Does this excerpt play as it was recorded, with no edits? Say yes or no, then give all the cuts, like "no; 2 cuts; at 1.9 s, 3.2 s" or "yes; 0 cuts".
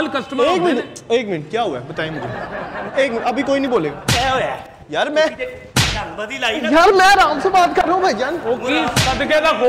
yes; 0 cuts